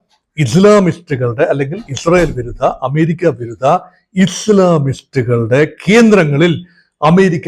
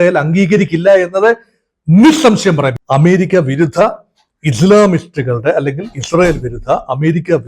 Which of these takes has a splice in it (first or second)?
second